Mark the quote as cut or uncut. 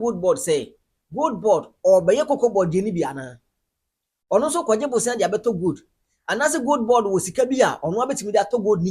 uncut